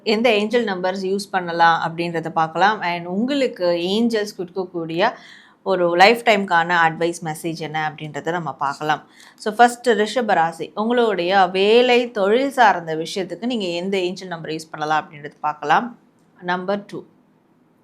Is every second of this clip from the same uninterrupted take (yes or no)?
yes